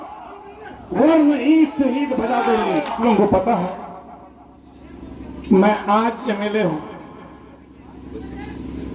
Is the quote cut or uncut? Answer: cut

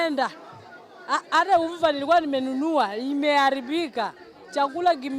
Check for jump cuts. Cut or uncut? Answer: uncut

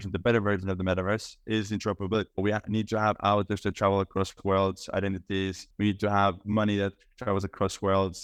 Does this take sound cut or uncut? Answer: uncut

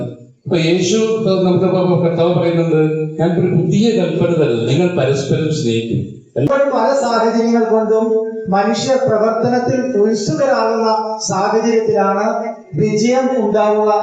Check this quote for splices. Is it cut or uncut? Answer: cut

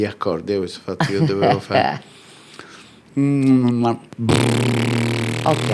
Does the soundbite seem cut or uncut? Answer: uncut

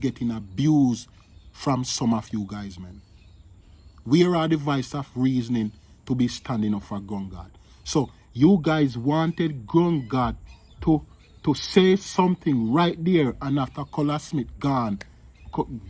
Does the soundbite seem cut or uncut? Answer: uncut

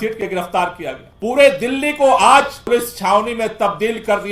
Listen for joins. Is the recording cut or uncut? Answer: cut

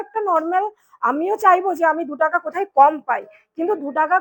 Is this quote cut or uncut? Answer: uncut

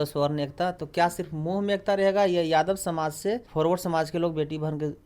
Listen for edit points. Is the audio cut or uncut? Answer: cut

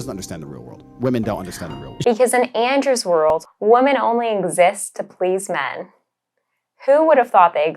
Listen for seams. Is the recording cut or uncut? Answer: cut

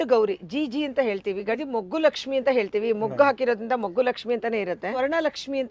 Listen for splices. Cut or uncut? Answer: cut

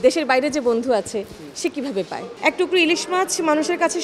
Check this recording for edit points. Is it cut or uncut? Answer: cut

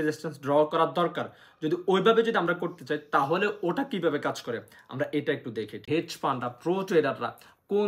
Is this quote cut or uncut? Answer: cut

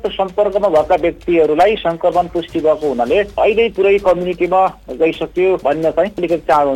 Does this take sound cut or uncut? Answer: cut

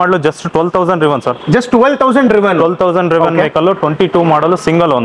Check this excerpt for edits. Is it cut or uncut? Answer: uncut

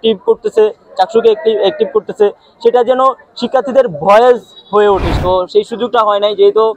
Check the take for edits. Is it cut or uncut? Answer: cut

